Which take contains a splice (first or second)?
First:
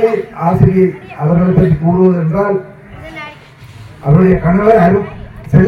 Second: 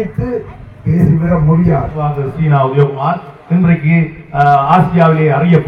second